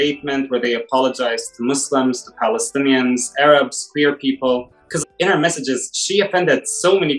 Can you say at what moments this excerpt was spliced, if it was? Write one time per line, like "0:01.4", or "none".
0:05.0